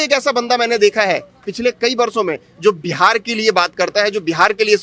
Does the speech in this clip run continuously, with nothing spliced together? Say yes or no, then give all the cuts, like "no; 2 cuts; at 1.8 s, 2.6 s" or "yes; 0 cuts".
yes; 0 cuts